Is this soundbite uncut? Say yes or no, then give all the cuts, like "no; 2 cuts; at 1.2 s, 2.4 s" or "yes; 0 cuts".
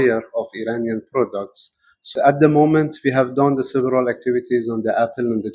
no; 1 cut; at 2.1 s